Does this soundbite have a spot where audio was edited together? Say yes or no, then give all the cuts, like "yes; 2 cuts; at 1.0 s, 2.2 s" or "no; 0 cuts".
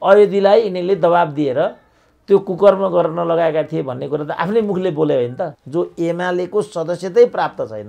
yes; 1 cut; at 5.6 s